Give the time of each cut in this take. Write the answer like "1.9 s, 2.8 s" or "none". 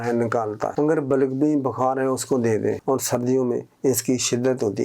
2.8 s